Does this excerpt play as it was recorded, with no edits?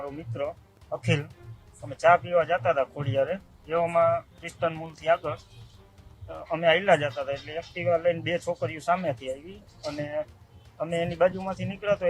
yes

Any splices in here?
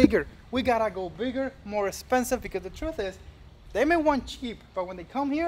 no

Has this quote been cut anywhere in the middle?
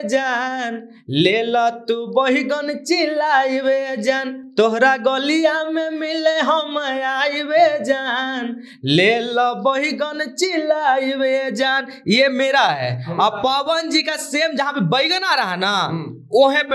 no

